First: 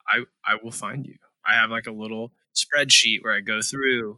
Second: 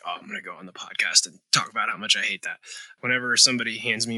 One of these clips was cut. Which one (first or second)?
second